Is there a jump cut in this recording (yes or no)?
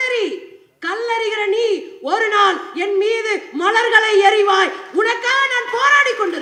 no